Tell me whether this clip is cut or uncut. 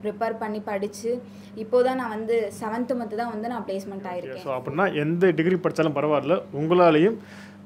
cut